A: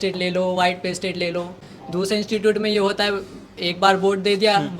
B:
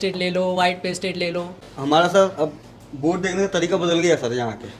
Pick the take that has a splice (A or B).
B